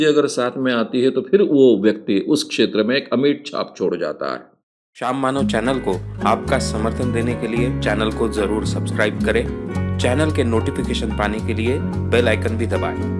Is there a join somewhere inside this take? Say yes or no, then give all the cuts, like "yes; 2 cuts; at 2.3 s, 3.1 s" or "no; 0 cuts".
yes; 1 cut; at 4.5 s